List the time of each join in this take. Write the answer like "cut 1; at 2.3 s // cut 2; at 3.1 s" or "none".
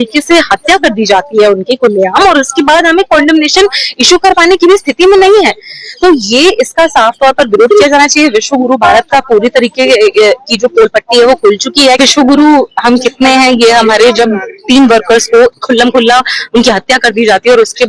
cut 1; at 12.0 s